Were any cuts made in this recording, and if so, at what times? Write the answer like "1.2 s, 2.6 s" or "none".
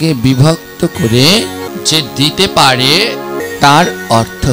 1.7 s, 3.4 s